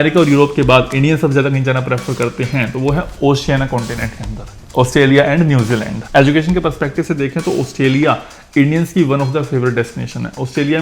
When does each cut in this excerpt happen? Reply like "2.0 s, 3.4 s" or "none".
4.4 s, 6.0 s